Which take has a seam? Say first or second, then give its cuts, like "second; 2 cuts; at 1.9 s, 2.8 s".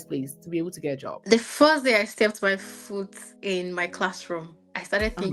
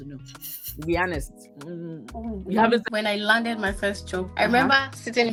first; 1 cut; at 1.1 s